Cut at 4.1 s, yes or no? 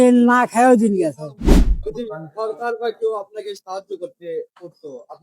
no